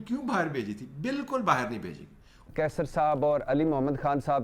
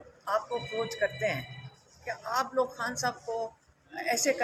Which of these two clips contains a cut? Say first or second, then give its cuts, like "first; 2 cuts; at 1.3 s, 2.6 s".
first; 1 cut; at 2.5 s